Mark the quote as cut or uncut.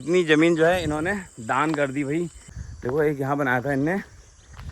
cut